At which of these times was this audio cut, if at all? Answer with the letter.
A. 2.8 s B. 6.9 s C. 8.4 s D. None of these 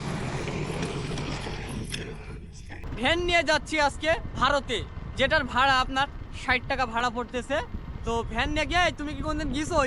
A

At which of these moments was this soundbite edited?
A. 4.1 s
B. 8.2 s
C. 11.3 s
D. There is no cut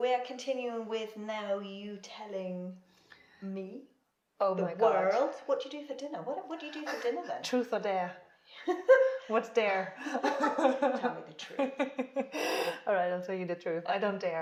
D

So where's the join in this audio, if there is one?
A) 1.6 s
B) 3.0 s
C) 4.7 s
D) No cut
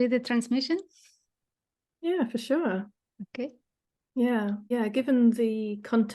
C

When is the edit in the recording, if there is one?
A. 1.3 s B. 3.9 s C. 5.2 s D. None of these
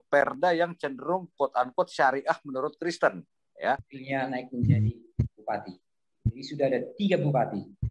B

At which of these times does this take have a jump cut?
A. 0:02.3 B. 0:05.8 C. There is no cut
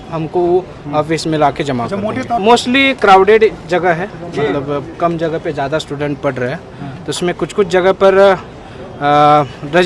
A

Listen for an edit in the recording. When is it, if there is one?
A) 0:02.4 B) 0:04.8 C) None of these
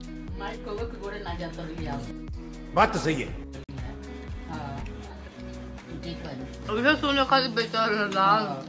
C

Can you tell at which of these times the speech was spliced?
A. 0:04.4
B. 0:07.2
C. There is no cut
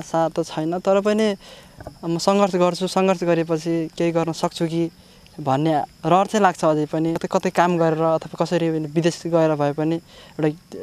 B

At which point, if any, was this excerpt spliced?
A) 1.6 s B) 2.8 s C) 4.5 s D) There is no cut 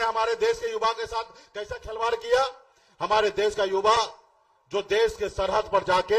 D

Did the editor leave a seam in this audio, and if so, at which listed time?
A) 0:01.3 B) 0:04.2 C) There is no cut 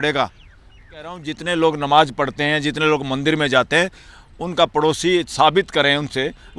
A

